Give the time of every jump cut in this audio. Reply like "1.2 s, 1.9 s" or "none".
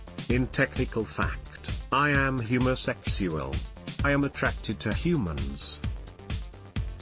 5.6 s

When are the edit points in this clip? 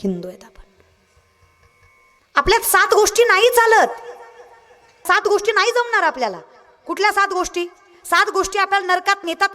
5.0 s

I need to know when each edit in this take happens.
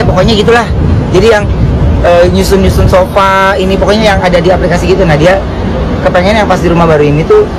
none

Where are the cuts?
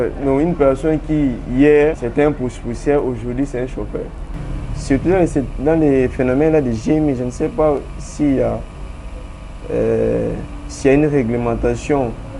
2.0 s, 4.2 s

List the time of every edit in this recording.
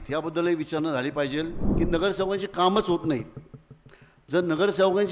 1.6 s

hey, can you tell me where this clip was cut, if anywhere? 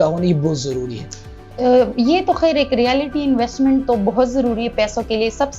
none

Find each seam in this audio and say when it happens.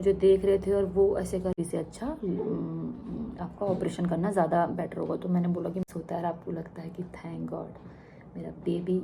1.5 s, 5.8 s

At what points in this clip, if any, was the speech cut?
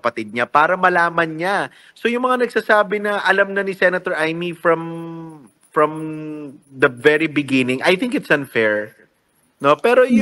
none

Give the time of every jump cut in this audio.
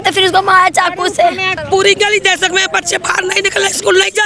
1.5 s

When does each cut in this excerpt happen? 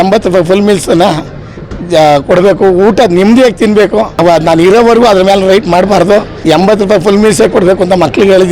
4.1 s, 6.3 s

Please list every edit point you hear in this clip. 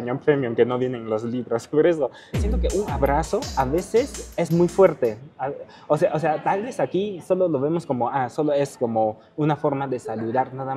2.3 s

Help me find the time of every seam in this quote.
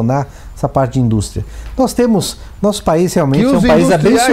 none

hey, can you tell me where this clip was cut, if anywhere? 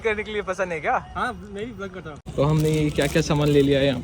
2.3 s

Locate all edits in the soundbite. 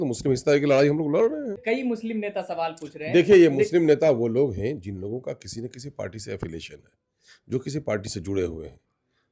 1.6 s

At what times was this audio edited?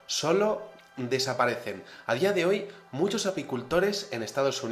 1.3 s

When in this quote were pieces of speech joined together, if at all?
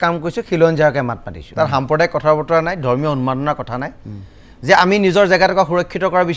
1.4 s

